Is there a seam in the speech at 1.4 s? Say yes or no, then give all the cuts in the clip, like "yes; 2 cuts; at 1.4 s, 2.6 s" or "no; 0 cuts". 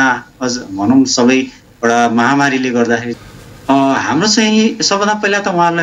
no; 1 cut; at 3.1 s